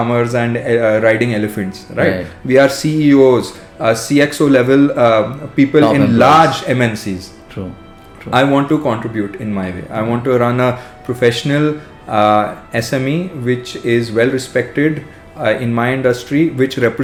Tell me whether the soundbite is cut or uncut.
uncut